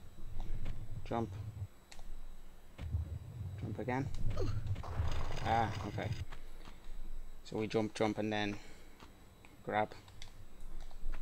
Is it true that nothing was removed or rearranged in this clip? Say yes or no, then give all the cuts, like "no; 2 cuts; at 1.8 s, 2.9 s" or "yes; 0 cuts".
no; 1 cut; at 7.9 s